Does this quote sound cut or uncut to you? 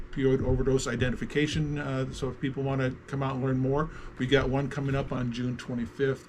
cut